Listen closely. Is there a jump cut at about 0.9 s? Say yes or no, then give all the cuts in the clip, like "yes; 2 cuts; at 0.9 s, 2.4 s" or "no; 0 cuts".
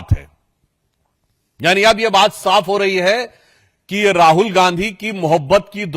no; 0 cuts